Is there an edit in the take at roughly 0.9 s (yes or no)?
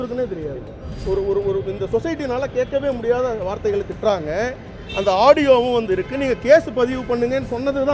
yes